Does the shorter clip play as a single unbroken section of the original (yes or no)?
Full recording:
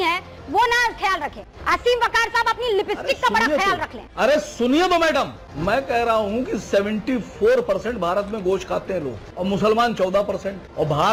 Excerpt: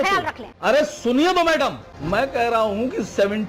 yes